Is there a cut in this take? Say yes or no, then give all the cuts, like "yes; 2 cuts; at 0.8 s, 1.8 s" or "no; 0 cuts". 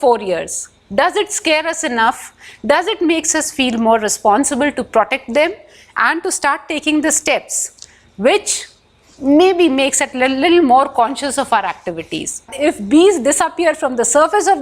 yes; 1 cut; at 12.5 s